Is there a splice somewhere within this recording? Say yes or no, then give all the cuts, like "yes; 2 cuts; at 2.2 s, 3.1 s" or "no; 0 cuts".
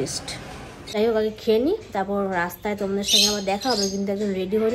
yes; 1 cut; at 0.9 s